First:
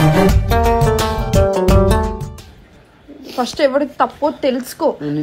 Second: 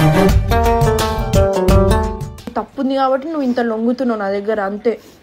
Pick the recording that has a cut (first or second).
second